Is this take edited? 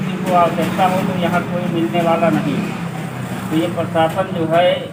no; 0 cuts

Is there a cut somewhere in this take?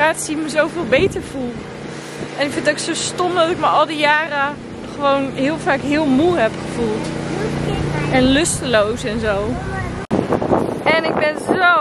no; 0 cuts

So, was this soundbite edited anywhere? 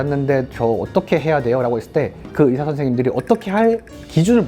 no; 0 cuts

